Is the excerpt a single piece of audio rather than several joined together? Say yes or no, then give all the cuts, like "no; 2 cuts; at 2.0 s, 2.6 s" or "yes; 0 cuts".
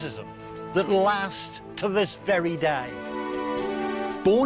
yes; 0 cuts